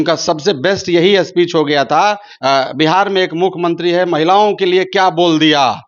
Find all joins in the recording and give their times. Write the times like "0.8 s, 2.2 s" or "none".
2.3 s